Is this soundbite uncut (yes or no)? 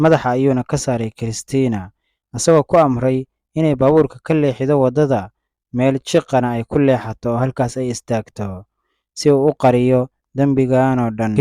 yes